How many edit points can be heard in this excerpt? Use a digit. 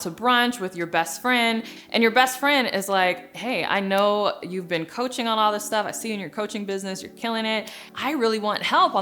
2